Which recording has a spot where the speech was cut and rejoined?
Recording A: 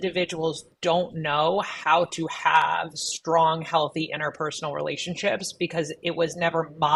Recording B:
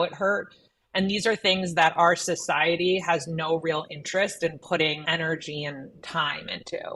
B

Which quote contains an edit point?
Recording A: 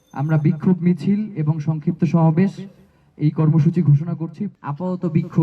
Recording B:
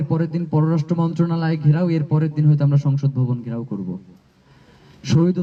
A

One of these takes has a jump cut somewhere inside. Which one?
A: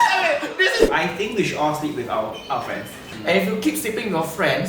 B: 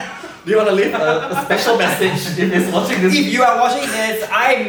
A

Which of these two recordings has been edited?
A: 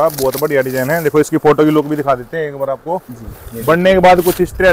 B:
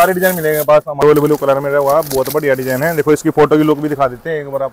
B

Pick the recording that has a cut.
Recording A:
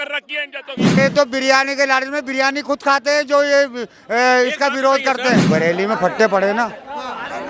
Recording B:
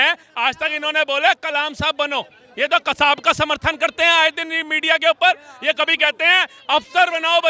A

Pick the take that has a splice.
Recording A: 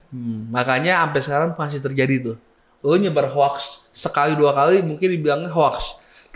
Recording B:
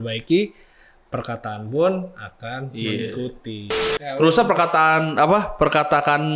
B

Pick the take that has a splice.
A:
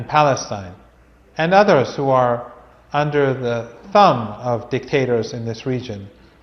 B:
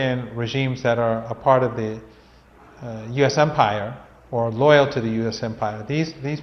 A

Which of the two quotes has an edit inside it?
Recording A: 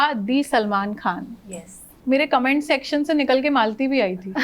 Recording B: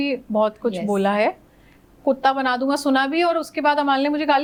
A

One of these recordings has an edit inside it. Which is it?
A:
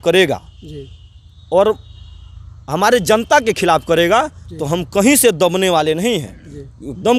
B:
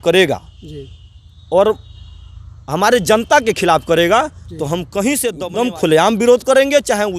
B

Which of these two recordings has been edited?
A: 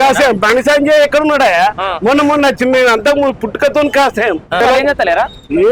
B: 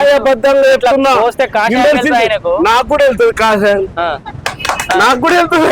A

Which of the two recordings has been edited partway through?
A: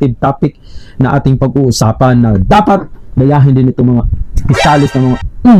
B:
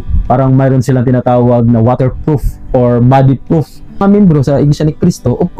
B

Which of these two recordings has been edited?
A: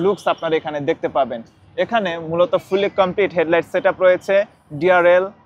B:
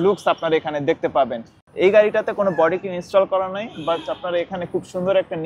B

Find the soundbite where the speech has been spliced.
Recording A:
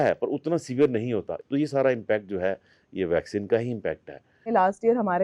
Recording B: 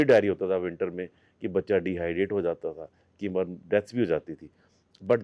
A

